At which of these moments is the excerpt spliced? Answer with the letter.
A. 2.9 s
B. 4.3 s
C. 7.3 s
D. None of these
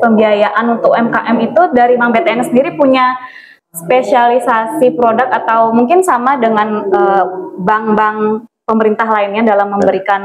D